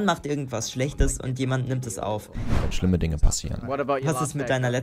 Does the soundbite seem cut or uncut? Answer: cut